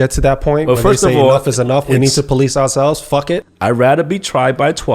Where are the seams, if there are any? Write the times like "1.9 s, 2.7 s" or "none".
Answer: 3.5 s